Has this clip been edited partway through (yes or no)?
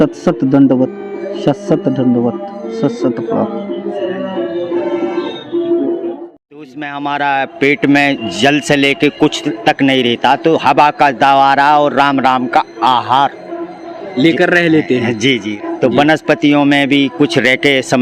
yes